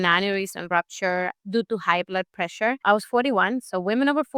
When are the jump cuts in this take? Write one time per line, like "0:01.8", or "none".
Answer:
0:01.4
0:02.8